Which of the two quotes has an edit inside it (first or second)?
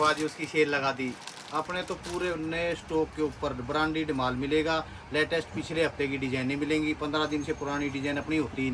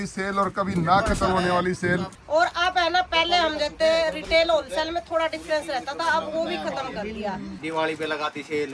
second